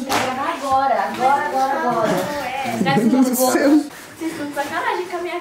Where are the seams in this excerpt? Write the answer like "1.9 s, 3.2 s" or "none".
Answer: 4.0 s